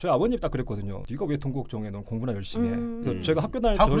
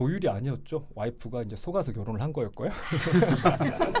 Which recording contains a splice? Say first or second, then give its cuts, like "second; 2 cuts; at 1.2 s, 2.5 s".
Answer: first; 1 cut; at 1.0 s